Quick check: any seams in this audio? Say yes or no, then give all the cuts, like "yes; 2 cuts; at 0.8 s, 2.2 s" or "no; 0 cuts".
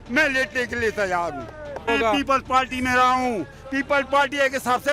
yes; 1 cut; at 1.9 s